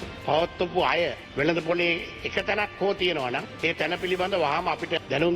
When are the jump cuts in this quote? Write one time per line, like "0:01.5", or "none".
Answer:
0:01.3